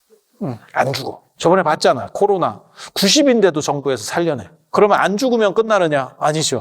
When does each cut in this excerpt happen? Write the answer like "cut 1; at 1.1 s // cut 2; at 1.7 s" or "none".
cut 1; at 1.3 s // cut 2; at 4.7 s